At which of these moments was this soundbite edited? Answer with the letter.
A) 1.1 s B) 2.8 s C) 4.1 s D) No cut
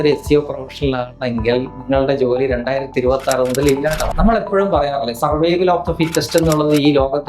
C